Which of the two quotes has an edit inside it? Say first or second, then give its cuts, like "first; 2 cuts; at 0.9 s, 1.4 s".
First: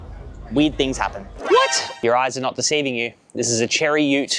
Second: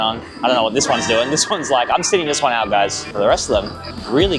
first; 1 cut; at 1.3 s